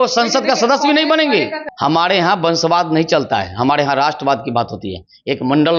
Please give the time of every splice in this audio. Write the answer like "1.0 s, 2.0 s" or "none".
1.6 s

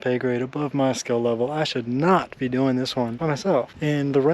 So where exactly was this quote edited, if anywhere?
3.2 s

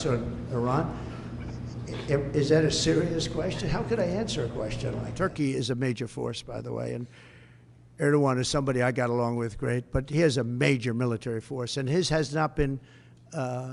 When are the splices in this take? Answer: 5.1 s

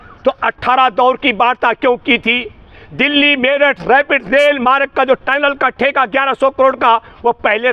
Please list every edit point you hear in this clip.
none

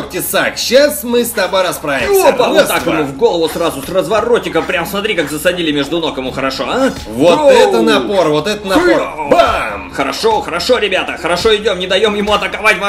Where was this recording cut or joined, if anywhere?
none

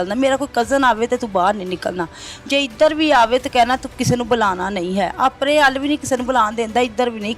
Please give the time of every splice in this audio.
none

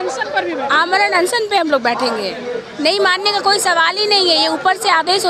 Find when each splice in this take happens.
none

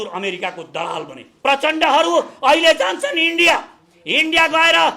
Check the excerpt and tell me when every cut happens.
1.2 s

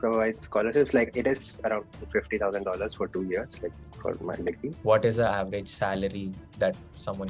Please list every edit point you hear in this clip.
4.7 s

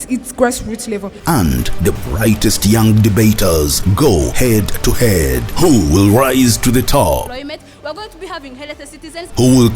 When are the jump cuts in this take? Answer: 1.1 s

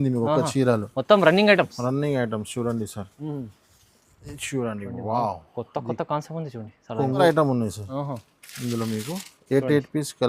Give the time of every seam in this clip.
7.2 s

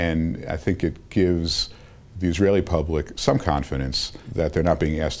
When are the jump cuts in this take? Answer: 4.2 s

